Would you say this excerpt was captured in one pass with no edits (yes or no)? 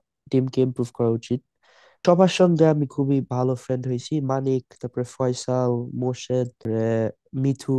no